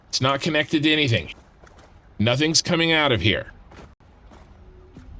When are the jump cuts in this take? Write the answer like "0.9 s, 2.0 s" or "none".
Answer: 1.3 s